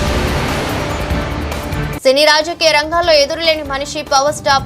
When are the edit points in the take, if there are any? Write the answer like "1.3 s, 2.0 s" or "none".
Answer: 1.9 s